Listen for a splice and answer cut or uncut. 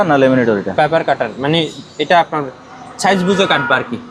uncut